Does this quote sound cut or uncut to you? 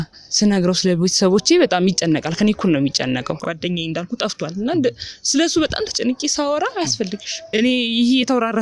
cut